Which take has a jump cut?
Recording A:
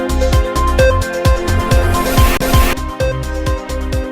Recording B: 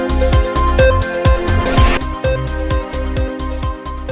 A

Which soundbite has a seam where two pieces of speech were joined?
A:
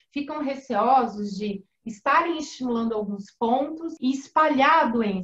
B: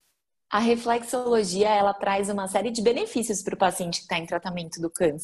A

